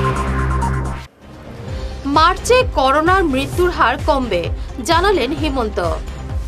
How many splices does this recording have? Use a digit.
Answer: 1